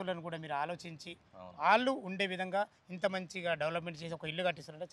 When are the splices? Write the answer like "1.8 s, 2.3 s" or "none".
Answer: none